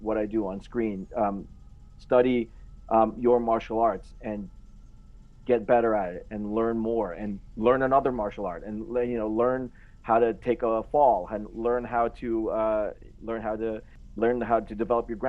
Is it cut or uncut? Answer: uncut